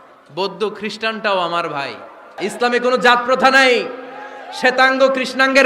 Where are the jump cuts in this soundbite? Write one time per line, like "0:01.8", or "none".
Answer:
0:02.3